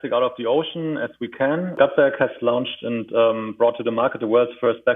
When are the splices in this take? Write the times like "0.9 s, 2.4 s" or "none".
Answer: 1.8 s

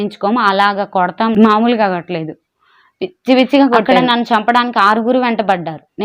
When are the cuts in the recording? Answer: 1.4 s, 3.9 s

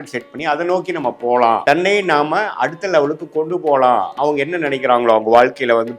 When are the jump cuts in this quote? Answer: 1.6 s, 4.1 s

